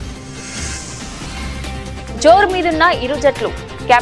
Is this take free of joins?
no; 1 cut; at 1.4 s

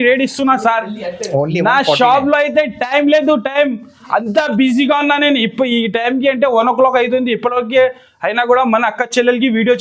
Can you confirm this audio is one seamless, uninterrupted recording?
yes; 0 cuts

